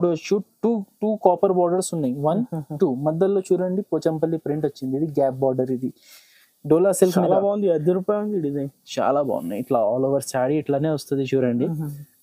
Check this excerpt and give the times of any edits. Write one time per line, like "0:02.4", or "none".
none